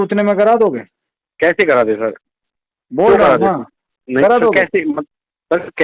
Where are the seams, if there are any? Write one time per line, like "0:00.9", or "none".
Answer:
none